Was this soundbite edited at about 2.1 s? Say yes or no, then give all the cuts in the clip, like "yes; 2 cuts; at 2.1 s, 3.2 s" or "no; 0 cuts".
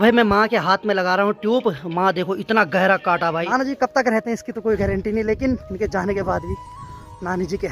no; 2 cuts; at 3.4 s, 5.7 s